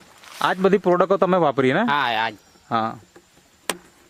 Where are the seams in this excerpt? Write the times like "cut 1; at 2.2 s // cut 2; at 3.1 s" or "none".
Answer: none